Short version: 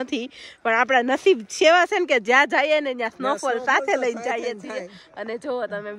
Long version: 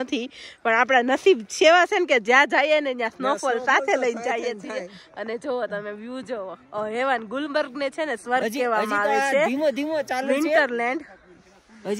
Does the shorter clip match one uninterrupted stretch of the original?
yes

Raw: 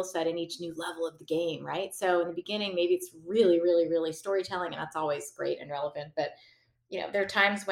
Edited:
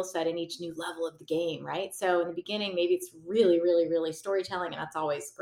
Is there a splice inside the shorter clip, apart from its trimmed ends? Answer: no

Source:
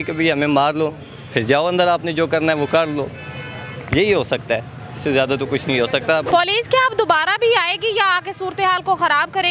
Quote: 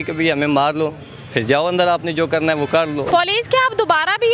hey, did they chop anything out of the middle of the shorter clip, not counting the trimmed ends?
yes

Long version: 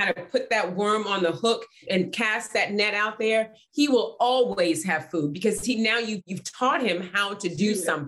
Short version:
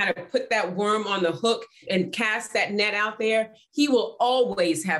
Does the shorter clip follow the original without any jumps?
yes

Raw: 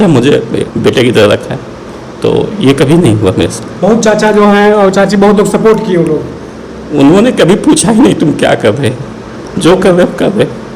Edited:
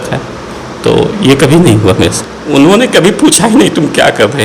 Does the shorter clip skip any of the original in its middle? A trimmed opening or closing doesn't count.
yes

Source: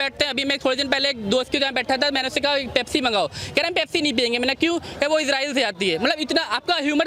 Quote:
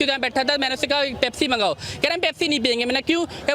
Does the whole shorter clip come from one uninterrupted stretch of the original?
yes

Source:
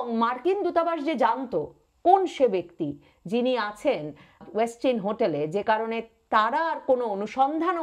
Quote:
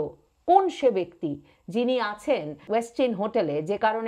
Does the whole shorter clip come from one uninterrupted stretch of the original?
no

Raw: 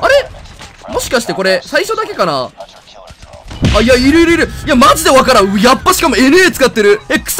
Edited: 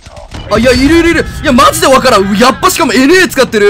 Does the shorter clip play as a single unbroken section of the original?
yes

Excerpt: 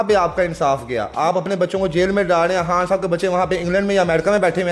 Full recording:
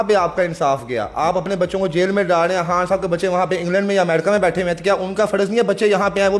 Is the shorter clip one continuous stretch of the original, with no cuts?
yes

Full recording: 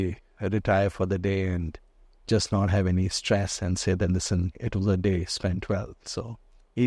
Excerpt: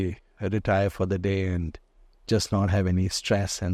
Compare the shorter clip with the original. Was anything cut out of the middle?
no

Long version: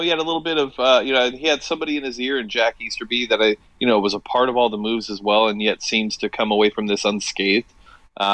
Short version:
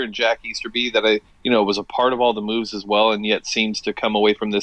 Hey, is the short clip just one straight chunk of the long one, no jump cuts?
yes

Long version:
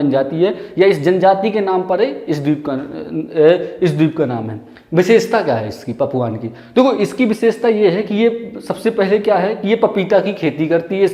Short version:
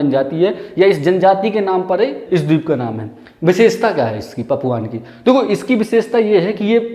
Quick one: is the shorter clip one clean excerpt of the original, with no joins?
no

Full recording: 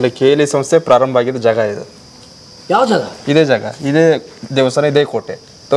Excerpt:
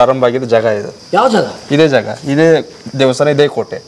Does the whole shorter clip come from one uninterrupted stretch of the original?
no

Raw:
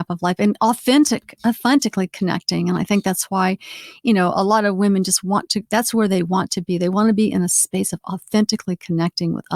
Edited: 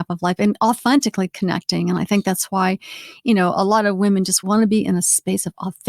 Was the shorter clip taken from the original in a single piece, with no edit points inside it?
no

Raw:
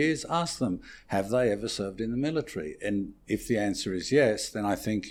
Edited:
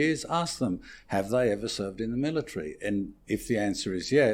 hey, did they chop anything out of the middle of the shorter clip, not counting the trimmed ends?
no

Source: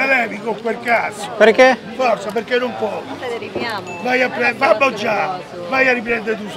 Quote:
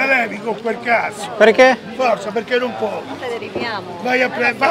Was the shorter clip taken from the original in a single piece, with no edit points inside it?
yes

